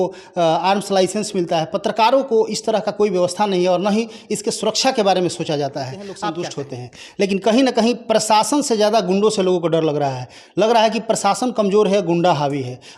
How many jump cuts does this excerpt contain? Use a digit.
1